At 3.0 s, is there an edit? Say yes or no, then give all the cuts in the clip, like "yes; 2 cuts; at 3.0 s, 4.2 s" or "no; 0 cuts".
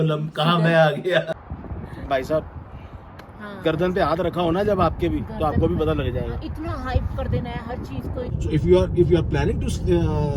no; 2 cuts; at 1.4 s, 8.3 s